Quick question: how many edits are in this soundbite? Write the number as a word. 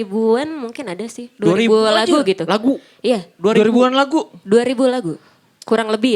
zero